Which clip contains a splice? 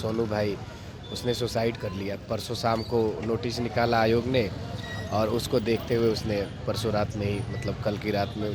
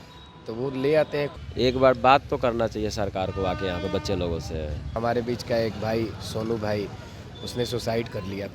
second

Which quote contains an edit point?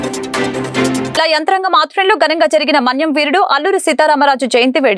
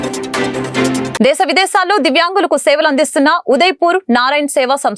first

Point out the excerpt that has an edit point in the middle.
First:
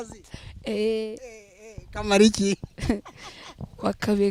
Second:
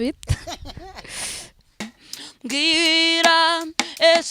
second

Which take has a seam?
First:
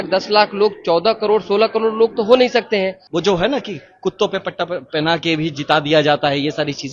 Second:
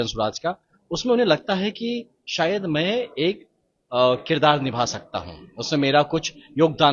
first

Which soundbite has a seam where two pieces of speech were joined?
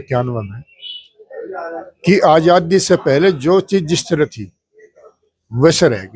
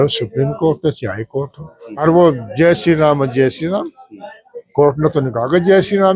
second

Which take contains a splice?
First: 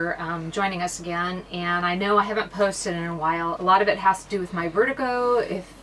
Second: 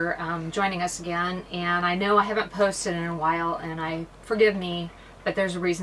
first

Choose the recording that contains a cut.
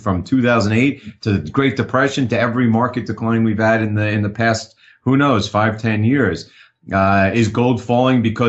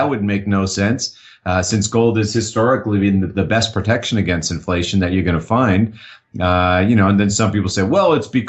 first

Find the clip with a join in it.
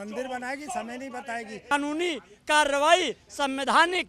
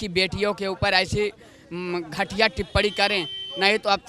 first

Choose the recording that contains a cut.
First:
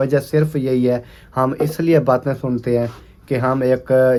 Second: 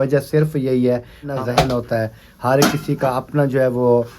second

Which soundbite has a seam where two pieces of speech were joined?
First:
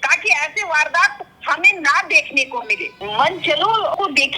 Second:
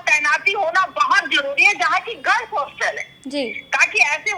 first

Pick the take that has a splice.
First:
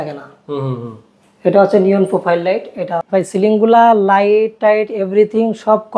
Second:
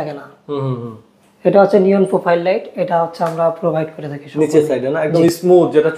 first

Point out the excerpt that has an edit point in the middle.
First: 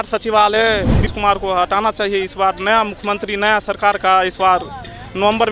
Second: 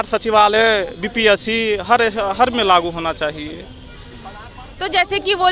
first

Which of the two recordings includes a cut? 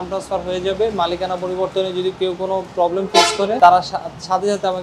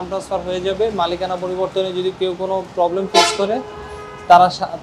first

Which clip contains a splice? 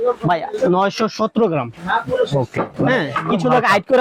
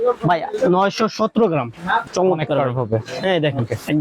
second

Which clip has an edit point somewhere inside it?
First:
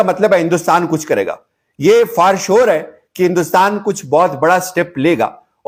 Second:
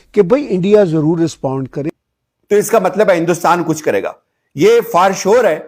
second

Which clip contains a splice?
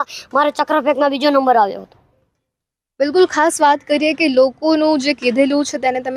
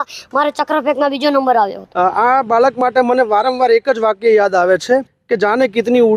second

